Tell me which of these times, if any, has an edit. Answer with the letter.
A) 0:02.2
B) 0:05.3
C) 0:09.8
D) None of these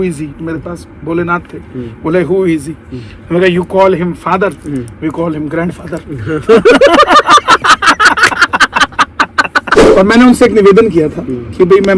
C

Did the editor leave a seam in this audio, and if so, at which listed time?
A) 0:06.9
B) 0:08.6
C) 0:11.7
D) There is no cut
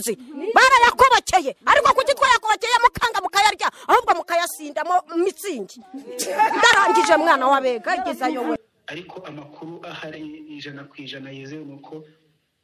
B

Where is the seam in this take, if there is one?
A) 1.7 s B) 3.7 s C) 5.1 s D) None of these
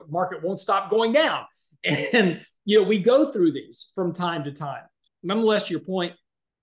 C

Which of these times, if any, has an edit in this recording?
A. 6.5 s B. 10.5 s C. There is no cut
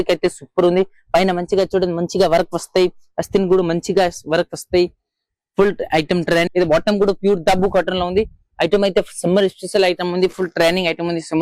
A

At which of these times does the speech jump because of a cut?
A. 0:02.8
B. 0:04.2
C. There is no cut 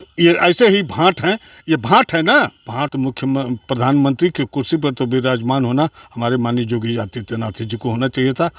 A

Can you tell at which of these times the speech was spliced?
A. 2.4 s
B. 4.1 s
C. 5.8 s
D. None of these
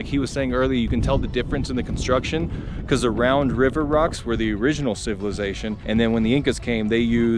C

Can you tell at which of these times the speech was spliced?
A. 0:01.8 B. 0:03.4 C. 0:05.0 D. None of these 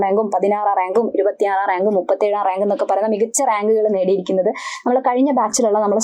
D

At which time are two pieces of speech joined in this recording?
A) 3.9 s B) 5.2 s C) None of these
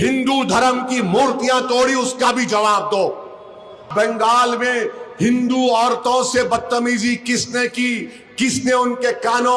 A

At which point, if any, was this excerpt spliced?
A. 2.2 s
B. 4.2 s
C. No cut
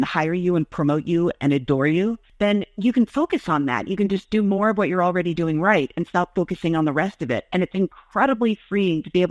A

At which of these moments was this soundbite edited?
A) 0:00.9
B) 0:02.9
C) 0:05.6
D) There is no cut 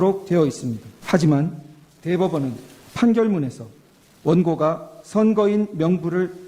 A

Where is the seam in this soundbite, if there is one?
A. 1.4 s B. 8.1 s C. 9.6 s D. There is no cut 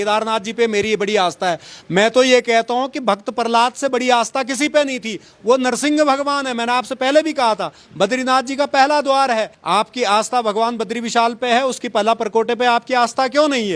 C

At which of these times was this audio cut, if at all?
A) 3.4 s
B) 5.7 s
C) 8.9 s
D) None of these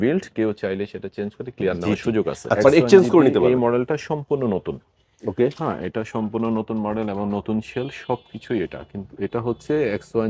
A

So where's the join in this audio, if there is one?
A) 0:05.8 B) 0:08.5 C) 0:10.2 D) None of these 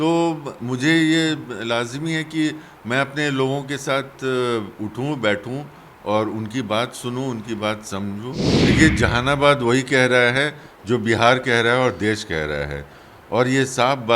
B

